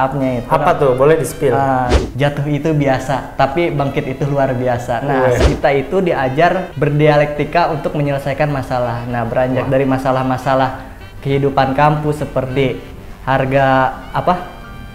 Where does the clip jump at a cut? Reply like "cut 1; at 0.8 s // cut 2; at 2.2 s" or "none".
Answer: cut 1; at 2.0 s // cut 2; at 5.4 s // cut 3; at 6.7 s